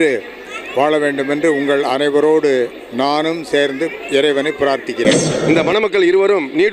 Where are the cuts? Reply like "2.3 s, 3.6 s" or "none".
5.3 s